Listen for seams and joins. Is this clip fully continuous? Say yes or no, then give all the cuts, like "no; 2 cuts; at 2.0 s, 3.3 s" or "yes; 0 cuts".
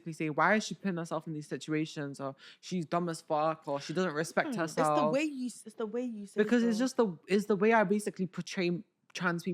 yes; 0 cuts